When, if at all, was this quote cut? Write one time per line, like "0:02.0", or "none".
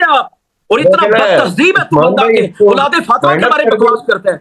none